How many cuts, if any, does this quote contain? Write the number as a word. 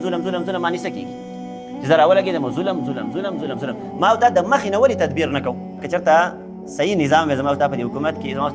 one